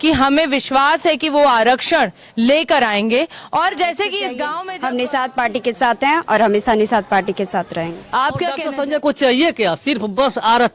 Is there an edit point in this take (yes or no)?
yes